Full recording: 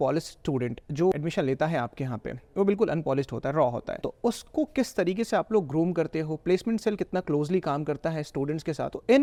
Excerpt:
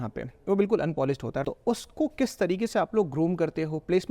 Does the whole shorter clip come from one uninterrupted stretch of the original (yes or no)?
no